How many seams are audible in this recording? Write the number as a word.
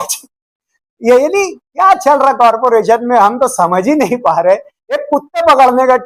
zero